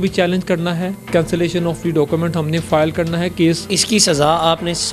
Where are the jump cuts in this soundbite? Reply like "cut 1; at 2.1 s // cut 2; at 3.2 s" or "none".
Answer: cut 1; at 1.1 s // cut 2; at 3.6 s